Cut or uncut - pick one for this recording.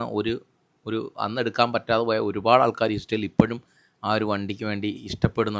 uncut